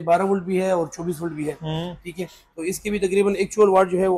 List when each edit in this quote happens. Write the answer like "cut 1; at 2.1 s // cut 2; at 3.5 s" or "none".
none